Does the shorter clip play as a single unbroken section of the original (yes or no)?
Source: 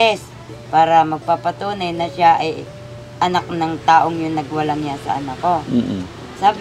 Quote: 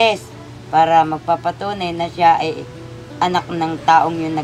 yes